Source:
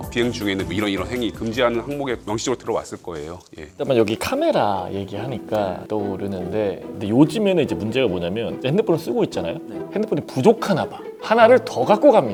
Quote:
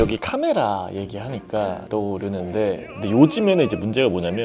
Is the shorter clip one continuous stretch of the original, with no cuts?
yes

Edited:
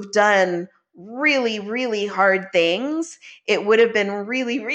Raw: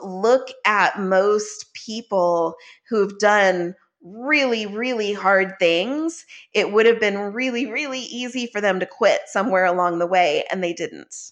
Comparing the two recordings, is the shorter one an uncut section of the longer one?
yes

